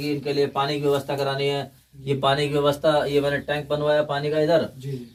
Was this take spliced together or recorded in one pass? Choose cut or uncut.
uncut